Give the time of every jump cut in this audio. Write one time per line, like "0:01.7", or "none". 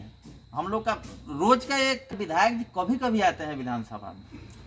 0:02.1